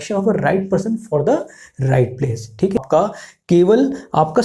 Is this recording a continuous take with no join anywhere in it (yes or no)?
no